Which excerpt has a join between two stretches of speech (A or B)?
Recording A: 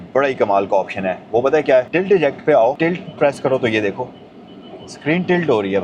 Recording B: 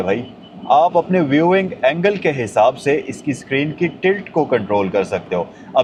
A